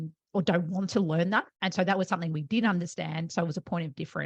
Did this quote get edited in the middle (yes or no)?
no